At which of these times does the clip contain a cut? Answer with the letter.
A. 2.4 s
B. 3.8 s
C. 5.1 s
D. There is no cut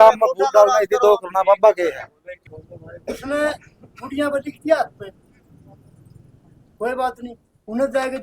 A